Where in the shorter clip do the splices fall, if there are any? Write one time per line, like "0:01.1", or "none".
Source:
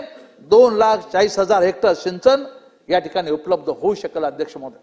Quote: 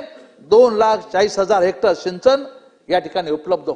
none